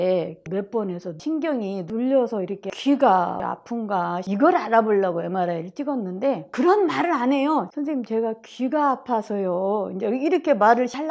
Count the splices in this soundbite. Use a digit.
0